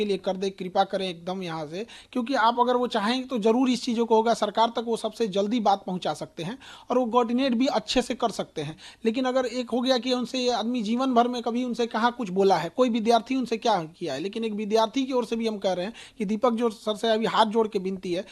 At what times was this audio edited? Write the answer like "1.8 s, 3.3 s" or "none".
none